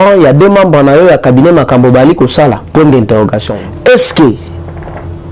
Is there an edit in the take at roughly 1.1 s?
no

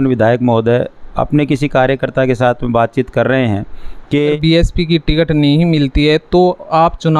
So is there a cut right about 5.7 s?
no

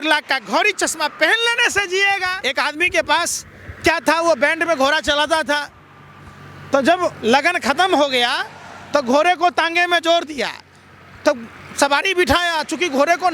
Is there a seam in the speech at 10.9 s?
no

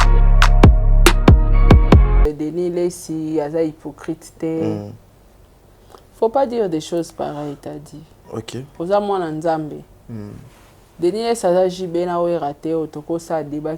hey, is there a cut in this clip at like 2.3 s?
yes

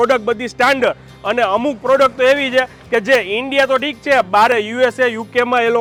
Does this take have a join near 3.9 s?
no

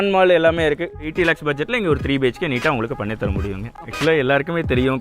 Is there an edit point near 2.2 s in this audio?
no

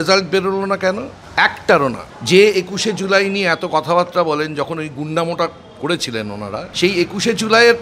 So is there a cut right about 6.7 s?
yes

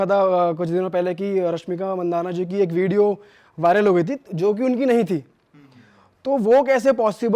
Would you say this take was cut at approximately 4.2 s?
no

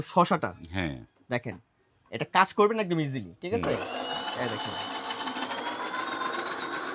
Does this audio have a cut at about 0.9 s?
no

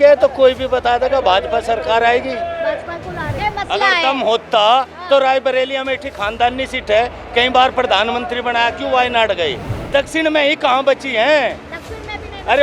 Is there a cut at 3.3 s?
yes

